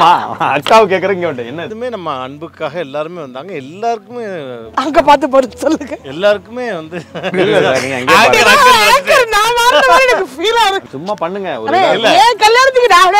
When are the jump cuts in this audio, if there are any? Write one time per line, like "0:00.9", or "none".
0:01.7
0:10.9